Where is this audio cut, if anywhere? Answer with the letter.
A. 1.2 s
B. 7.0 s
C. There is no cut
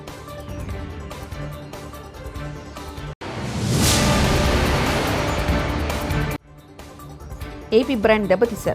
A